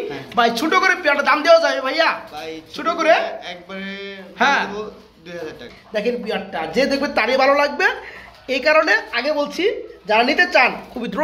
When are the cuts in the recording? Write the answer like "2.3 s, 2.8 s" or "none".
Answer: 5.6 s